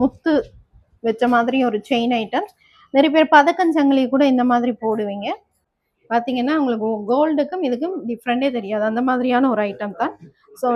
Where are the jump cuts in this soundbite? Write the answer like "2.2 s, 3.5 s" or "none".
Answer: 5.8 s